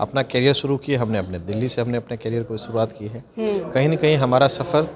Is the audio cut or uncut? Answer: uncut